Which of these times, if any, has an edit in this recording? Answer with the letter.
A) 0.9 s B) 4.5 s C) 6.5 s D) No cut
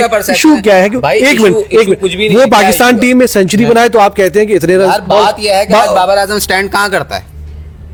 D